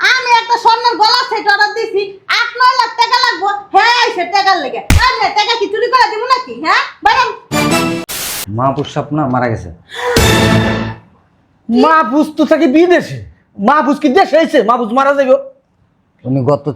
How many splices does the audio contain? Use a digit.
1